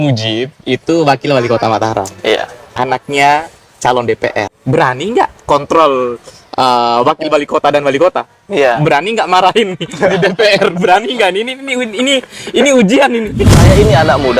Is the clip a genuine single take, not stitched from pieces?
no; 2 cuts; at 4.5 s, 13.5 s

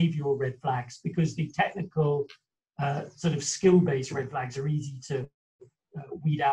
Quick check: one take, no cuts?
yes; 0 cuts

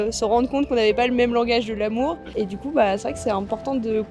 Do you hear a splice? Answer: yes; 1 cut; at 2.4 s

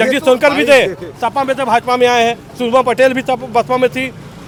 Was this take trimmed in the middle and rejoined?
no; 0 cuts

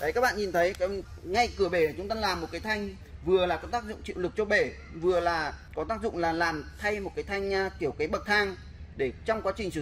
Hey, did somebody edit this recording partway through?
yes; 2 cuts; at 1.1 s, 5.6 s

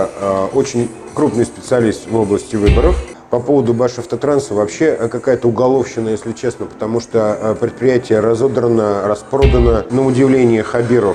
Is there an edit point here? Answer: yes; 2 cuts; at 3.1 s, 9.9 s

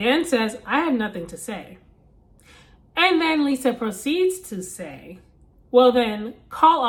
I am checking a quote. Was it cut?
no; 0 cuts

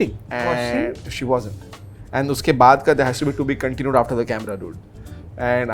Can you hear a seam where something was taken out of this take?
no; 0 cuts

